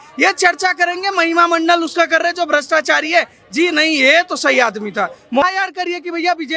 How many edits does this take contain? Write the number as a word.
one